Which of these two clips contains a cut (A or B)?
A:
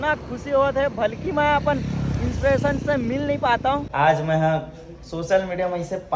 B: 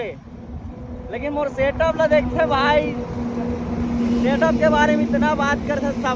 A